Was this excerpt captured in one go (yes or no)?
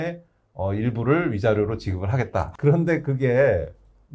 no